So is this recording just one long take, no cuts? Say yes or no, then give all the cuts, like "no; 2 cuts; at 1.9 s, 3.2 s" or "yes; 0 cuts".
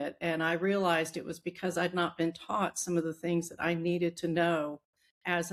yes; 0 cuts